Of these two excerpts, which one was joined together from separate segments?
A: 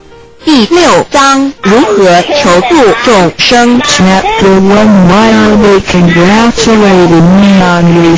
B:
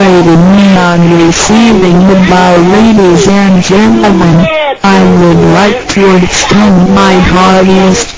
A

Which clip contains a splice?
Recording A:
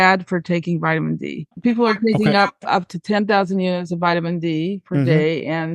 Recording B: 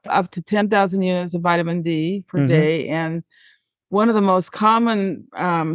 A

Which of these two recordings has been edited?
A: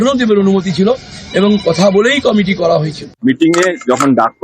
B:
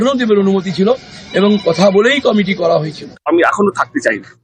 A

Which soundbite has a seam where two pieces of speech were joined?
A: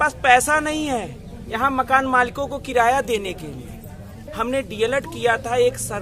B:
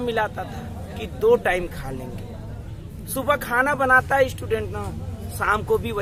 A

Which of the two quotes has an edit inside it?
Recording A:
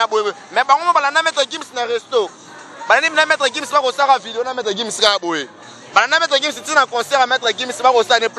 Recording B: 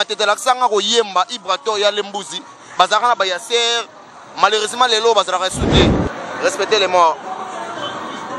B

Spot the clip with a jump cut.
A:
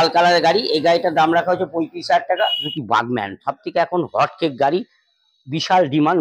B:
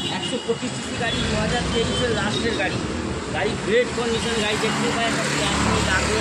A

